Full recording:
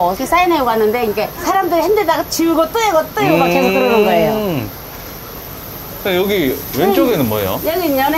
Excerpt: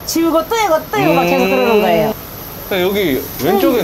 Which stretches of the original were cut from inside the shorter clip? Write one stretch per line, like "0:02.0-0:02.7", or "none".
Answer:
0:04.4-0:05.5